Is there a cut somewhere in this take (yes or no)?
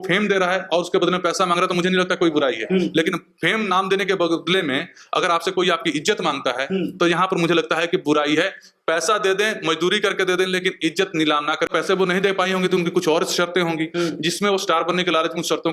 yes